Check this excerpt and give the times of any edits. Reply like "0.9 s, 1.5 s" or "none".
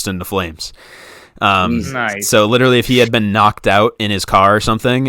none